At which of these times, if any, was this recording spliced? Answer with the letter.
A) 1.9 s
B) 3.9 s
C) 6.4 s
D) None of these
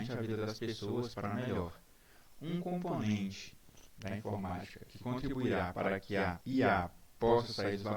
C